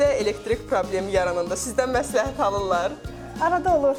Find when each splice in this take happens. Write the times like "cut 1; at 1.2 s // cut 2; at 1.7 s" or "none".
none